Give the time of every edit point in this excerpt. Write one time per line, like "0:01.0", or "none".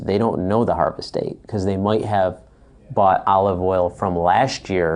none